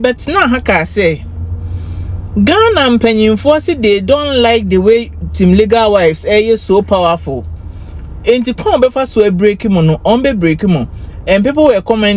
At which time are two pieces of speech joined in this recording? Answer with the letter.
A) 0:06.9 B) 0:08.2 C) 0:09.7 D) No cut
D